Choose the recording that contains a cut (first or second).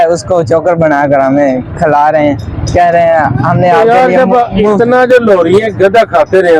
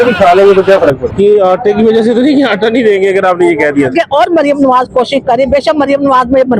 second